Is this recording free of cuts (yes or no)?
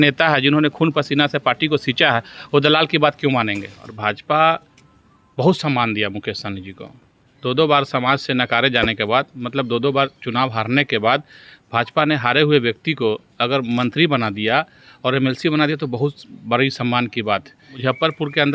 no